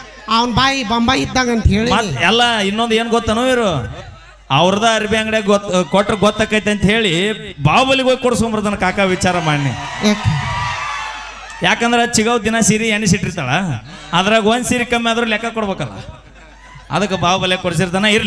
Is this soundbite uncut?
yes; 0 cuts

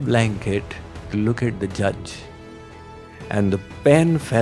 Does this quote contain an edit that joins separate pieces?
no; 0 cuts

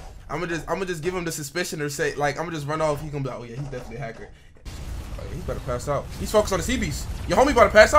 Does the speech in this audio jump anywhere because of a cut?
yes; 1 cut; at 4.7 s

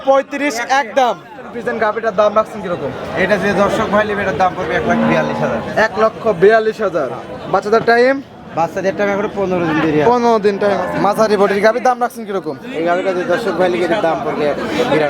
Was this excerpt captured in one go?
no; 2 cuts; at 1.6 s, 10.8 s

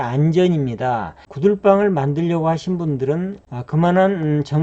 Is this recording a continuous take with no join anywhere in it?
no; 2 cuts; at 1.2 s, 3.4 s

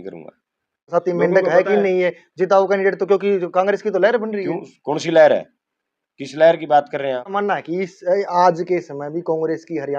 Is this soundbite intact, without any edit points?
no; 2 cuts; at 0.9 s, 7.2 s

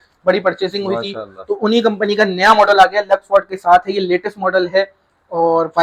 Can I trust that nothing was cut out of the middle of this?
yes; 0 cuts

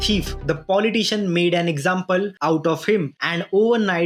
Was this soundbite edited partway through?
no; 0 cuts

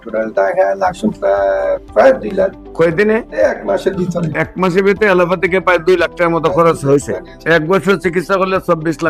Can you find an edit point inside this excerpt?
no; 0 cuts

